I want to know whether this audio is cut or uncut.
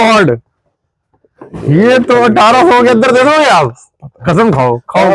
uncut